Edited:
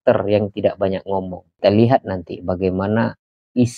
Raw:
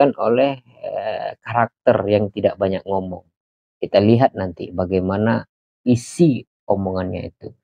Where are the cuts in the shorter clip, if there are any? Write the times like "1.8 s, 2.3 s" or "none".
1.4 s